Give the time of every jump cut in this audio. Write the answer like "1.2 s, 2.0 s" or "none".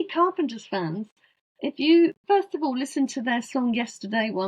2.2 s